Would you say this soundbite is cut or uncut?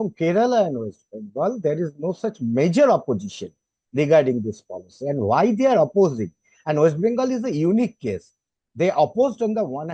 uncut